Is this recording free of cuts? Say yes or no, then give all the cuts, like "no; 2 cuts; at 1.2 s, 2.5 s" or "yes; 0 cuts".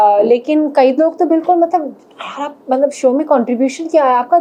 yes; 0 cuts